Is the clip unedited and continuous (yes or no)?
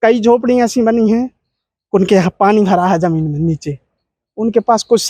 yes